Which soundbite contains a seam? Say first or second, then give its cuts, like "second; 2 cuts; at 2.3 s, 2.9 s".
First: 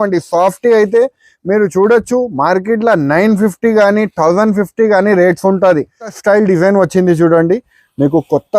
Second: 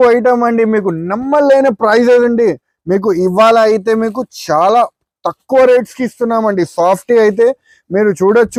first; 1 cut; at 6.1 s